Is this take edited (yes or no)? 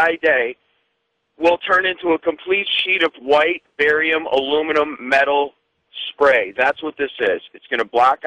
yes